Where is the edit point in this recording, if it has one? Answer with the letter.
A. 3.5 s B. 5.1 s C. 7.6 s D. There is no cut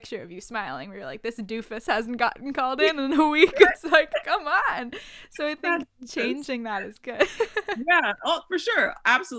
D